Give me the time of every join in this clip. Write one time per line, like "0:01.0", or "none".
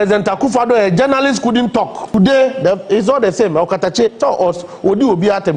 0:02.1